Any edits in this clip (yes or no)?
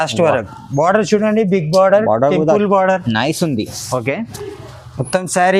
no